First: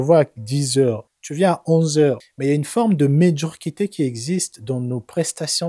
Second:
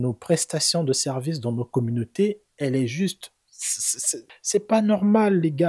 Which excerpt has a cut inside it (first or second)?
first